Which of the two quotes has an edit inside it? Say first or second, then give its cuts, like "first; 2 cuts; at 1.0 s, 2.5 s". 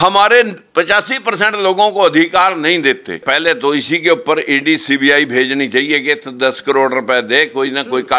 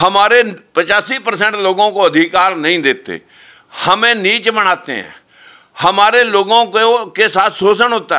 first; 1 cut; at 3.2 s